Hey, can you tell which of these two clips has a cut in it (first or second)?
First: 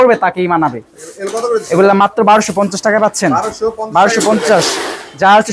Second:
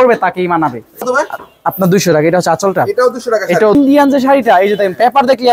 second